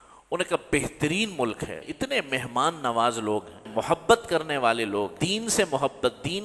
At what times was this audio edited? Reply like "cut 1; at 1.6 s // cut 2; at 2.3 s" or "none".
cut 1; at 1.7 s // cut 2; at 3.6 s // cut 3; at 5.2 s